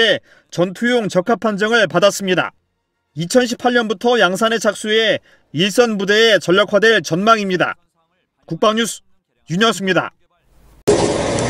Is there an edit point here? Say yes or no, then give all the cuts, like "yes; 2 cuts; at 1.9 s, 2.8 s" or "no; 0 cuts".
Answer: no; 0 cuts